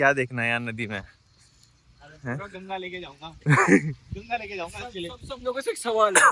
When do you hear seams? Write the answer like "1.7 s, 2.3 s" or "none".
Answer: none